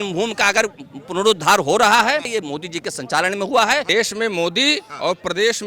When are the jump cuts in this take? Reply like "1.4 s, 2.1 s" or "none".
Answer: 2.3 s, 3.9 s